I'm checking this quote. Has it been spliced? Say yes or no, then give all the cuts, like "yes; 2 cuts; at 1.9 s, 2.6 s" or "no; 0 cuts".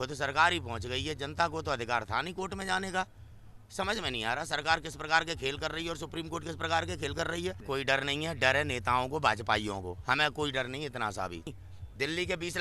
yes; 2 cuts; at 7.6 s, 11.5 s